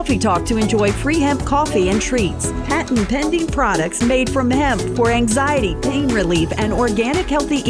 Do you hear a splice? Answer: no; 0 cuts

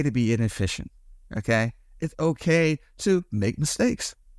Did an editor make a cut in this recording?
no; 0 cuts

